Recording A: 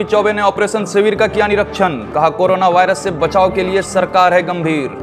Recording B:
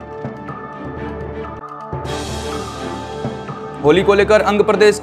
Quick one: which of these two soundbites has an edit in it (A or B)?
B